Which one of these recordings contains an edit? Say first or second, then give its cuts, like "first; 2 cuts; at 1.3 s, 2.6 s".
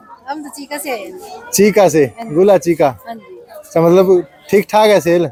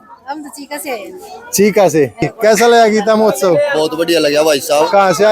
second; 1 cut; at 2.3 s